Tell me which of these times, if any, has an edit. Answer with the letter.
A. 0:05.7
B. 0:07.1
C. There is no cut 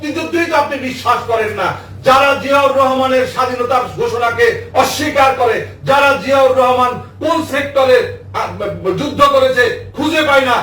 C